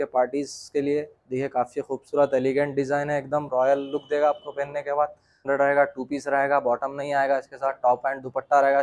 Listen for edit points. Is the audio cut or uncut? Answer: cut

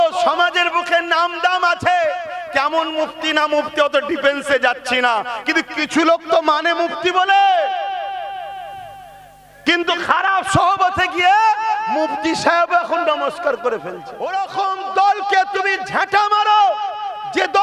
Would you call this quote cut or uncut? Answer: cut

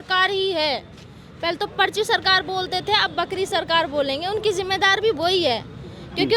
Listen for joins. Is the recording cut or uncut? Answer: uncut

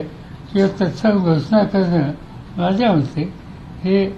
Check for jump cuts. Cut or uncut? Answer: uncut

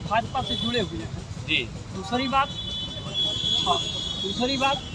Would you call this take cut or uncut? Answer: uncut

